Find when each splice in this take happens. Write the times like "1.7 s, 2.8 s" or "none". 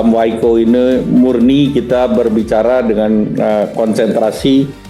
none